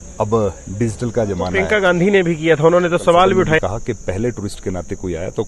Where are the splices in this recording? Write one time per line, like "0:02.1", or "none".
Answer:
0:01.6
0:03.6